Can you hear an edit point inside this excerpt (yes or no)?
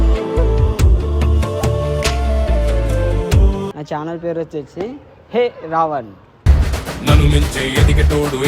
yes